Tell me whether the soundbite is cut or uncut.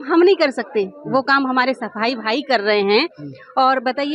uncut